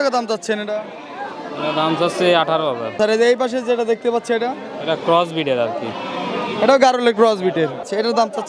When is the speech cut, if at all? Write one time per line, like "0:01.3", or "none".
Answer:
none